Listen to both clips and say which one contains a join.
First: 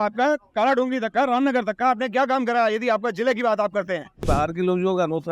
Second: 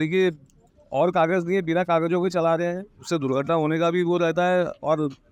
first; 1 cut; at 4.2 s

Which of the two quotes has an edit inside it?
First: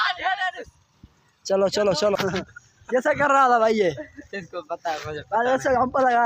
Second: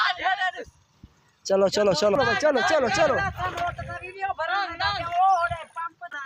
first; 1 cut; at 2.2 s

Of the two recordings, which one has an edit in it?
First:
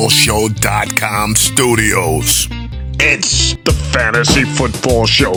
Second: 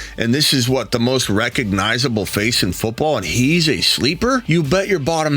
second; 1 cut; at 4.4 s

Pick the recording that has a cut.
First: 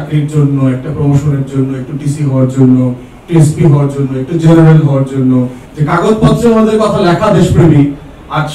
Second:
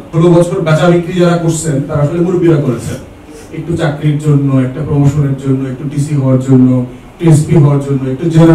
first; 1 cut; at 5.6 s

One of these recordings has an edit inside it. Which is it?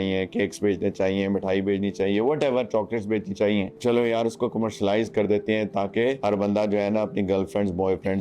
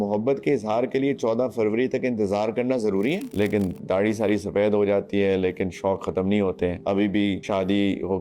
second; 2 cuts; at 3.3 s, 6.8 s

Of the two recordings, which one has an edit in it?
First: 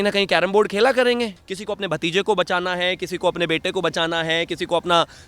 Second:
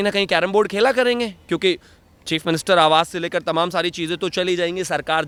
first; 1 cut; at 1.4 s

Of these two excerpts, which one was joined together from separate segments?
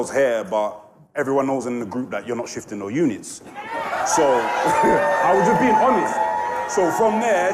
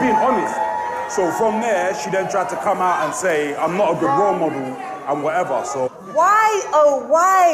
second; 1 cut; at 6.0 s

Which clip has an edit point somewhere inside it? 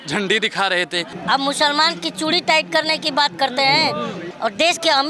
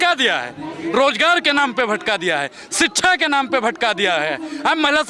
first; 2 cuts; at 1.1 s, 4.2 s

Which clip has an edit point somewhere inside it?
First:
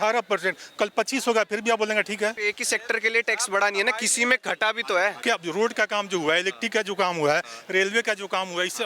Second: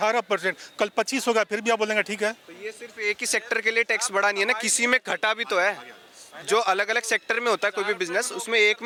first; 2 cuts; at 2.4 s, 5.2 s

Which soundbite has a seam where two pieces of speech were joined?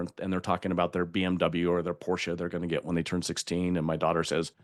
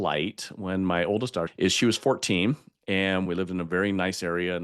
second; 2 cuts; at 1.5 s, 3.3 s

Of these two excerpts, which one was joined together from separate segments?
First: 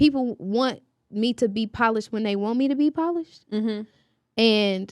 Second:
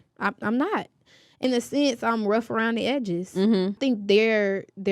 second; 2 cuts; at 1.4 s, 3.8 s

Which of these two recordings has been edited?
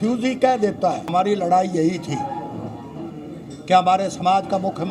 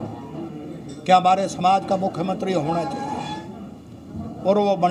first; 1 cut; at 1.0 s

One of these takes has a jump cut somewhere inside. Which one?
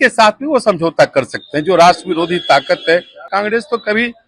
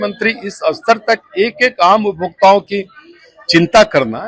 first; 1 cut; at 3.3 s

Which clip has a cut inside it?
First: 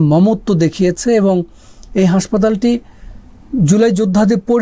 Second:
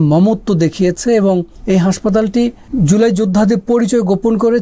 second; 2 cuts; at 1.5 s, 2.6 s

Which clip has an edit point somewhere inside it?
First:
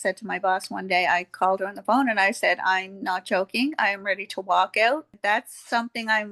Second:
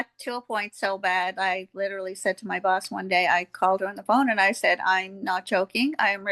first; 1 cut; at 5.1 s

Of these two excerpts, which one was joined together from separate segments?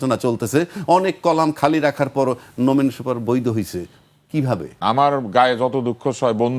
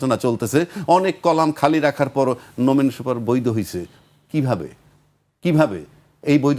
first; 1 cut; at 4.7 s

